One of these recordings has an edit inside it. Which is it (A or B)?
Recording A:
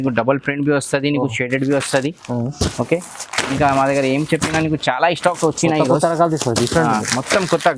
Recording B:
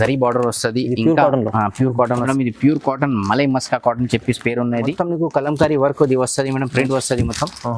B